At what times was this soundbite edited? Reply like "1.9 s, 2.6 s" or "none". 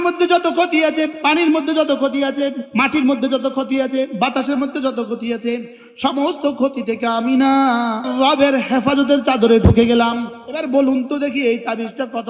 2.6 s, 8.1 s, 10.4 s

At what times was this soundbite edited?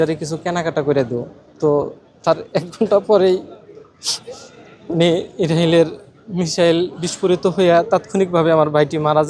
none

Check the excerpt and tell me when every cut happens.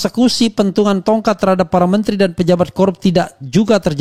none

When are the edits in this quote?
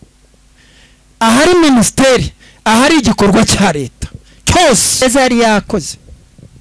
5.0 s

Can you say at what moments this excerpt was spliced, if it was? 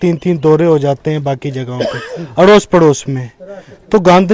none

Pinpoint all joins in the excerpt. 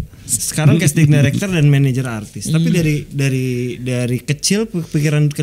none

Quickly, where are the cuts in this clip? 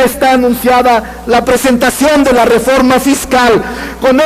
2.5 s

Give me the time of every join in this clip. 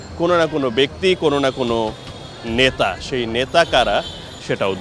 none

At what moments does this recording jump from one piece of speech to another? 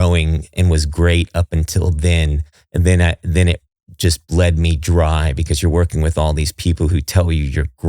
none

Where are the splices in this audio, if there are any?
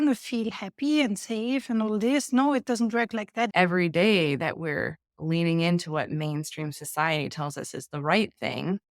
3.5 s

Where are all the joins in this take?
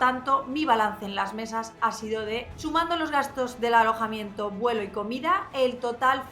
2.5 s

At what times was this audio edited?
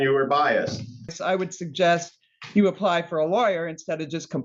1.2 s

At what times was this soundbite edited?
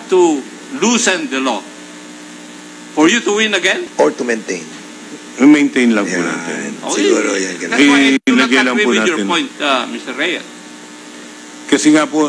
3.9 s

